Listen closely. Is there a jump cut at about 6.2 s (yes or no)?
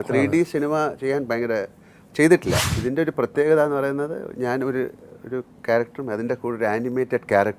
no